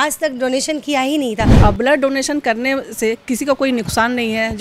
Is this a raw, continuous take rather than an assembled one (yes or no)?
no